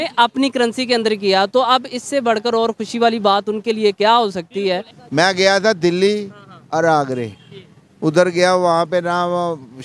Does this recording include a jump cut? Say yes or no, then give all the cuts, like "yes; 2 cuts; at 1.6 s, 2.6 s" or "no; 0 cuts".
yes; 1 cut; at 5.0 s